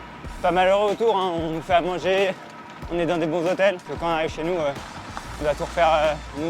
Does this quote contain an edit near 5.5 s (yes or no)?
no